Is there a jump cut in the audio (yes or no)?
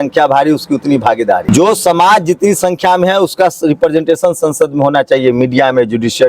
yes